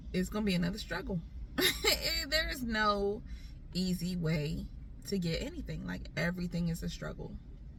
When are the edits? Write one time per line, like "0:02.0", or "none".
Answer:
none